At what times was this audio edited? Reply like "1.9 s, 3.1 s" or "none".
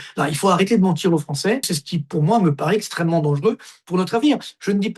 1.8 s